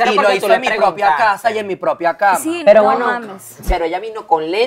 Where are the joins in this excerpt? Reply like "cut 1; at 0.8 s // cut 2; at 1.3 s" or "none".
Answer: cut 1; at 2.5 s // cut 2; at 3.5 s